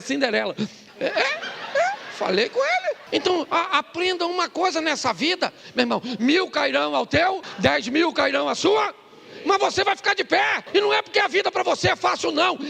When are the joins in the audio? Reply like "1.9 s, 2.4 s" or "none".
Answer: 3.0 s, 7.5 s, 10.6 s

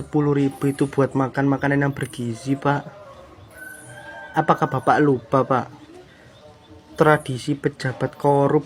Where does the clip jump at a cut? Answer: none

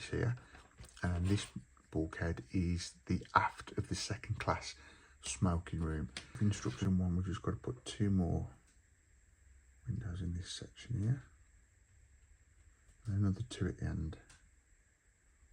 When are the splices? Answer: 6.3 s

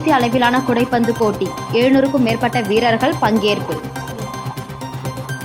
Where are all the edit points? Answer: none

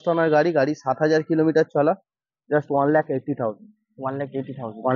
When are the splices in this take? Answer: none

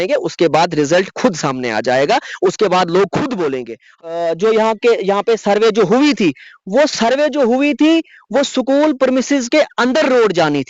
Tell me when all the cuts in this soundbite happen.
3.9 s

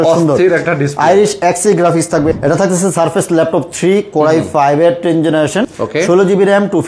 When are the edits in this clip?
2.3 s, 5.8 s

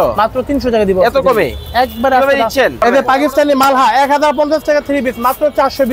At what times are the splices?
2.8 s

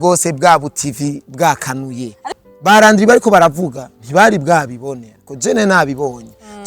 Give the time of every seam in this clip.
2.3 s

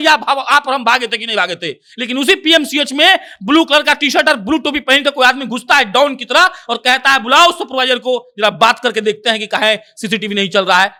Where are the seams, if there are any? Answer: none

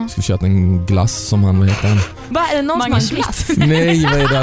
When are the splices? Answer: 2.2 s

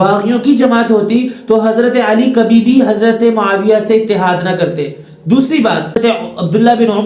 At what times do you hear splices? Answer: 6.0 s

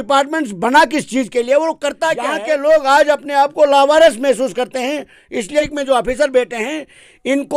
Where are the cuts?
2.3 s, 5.6 s

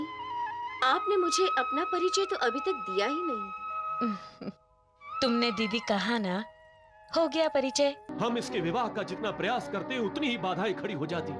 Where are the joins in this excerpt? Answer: 8.1 s

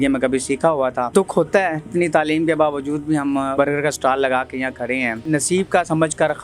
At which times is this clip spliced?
1.1 s, 1.9 s, 3.5 s, 5.2 s

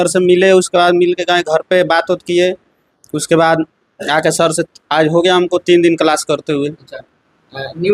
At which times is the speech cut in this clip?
none

